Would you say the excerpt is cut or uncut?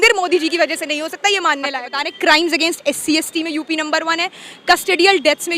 cut